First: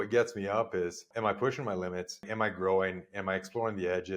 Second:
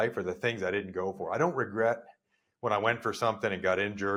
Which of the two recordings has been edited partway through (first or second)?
first